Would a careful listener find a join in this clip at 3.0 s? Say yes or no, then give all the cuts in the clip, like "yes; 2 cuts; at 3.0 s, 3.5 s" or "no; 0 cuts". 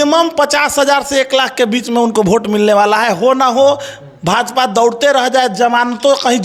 no; 0 cuts